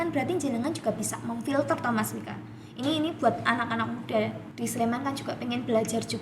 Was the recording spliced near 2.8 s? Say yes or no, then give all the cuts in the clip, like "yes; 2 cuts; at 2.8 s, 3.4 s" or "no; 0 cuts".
no; 1 cut; at 4.4 s